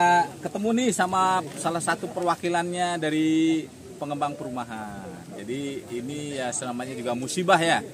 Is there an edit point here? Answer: no; 0 cuts

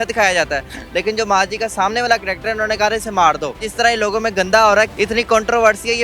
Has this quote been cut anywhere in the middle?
yes; 2 cuts; at 3.7 s, 4.9 s

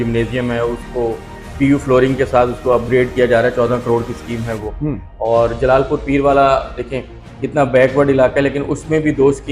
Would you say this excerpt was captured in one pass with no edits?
yes; 0 cuts

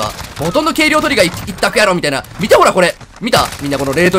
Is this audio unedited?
yes; 0 cuts

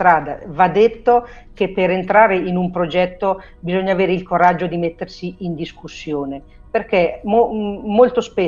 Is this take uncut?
yes; 0 cuts

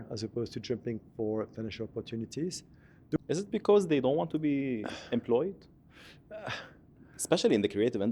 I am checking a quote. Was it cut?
yes; 1 cut; at 3.2 s

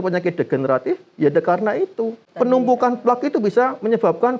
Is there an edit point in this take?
yes; 1 cut; at 2.2 s

